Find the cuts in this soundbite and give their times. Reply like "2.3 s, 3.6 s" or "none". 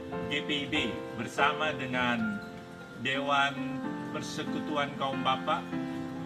none